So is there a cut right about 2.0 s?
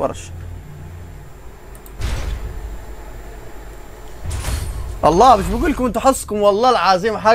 yes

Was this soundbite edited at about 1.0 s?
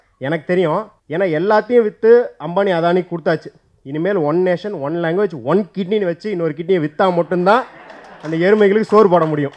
yes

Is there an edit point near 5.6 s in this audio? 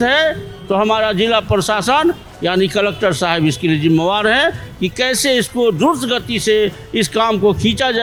no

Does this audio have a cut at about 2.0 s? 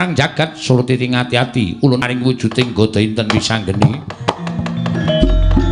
yes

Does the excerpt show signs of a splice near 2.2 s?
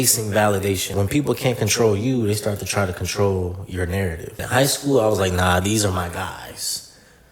no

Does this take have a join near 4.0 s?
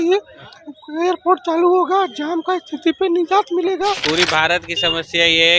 yes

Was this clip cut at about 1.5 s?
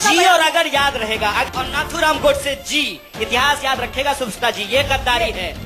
yes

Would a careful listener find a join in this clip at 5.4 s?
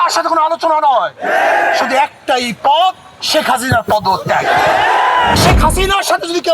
yes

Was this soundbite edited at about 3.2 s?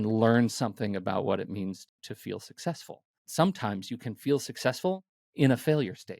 yes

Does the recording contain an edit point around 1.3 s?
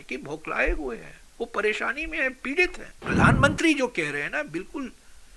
no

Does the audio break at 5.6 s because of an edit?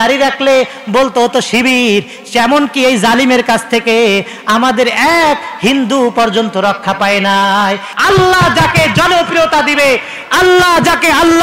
no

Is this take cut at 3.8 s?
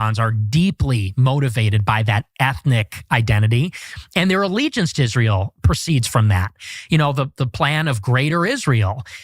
no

